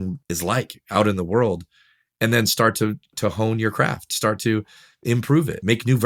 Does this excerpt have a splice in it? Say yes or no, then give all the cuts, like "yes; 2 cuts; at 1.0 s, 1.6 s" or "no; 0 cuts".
no; 0 cuts